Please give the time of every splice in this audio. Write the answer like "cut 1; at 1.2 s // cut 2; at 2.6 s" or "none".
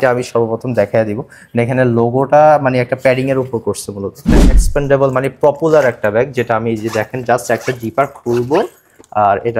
cut 1; at 4.6 s